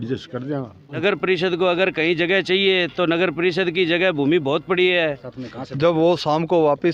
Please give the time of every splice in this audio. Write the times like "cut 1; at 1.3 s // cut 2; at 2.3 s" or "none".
cut 1; at 1.0 s // cut 2; at 5.3 s